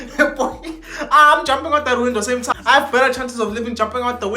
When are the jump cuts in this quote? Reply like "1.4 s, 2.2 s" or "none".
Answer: 2.5 s